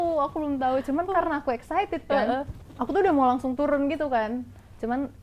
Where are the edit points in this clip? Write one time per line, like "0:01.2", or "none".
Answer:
0:02.6